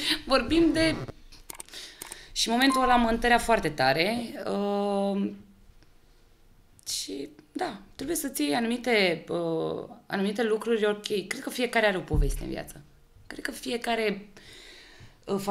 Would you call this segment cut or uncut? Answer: uncut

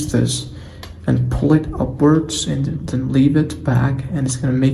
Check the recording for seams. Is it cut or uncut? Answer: uncut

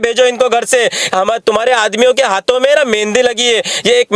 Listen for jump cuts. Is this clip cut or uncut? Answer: uncut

